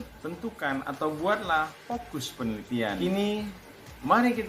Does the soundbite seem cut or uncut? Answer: cut